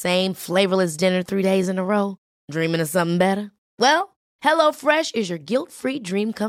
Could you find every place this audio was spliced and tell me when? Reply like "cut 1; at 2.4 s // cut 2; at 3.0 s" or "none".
none